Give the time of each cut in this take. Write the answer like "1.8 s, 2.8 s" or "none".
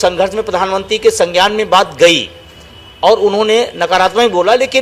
none